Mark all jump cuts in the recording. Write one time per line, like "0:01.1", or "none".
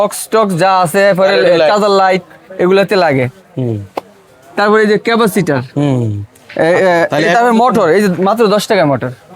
none